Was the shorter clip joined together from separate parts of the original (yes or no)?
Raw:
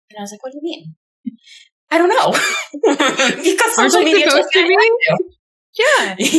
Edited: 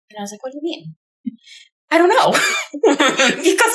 no